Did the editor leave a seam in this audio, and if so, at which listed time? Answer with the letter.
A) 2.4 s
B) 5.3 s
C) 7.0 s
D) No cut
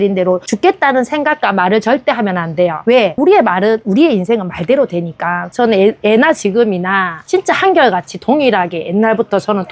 B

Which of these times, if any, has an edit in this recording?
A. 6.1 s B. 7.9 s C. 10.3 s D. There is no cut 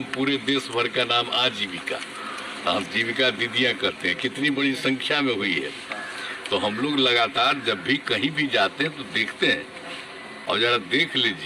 C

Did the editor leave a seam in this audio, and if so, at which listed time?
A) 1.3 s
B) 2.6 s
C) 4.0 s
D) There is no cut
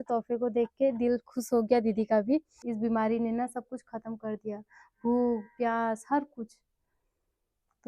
B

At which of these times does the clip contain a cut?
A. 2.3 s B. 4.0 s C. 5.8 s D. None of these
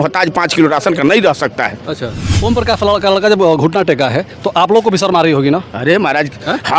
A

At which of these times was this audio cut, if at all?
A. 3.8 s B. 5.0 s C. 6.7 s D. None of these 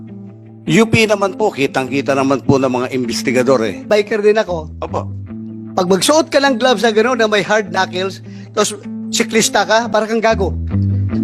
A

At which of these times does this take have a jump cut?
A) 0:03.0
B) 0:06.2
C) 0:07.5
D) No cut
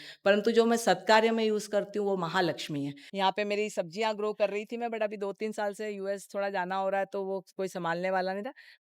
A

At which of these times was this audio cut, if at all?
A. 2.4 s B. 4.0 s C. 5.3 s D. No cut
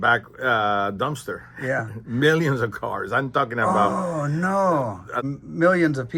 C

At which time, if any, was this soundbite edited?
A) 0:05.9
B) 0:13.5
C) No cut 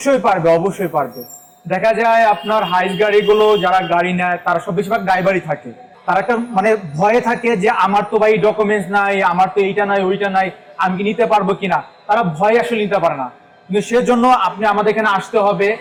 C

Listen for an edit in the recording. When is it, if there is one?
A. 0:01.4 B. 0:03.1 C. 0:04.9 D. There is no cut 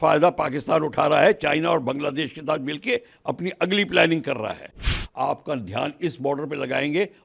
C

